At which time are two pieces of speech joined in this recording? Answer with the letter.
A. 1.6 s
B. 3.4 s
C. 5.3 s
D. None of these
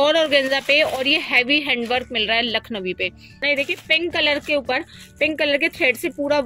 B